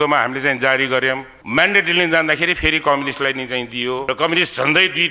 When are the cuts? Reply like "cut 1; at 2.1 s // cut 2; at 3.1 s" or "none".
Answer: cut 1; at 1.3 s // cut 2; at 4.0 s